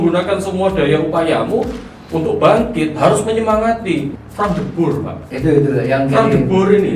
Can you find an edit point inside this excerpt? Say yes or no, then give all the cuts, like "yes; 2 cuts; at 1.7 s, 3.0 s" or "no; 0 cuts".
yes; 1 cut; at 4.1 s